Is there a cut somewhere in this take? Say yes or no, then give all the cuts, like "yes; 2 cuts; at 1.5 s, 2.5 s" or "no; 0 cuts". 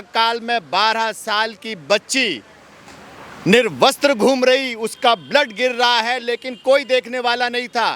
no; 0 cuts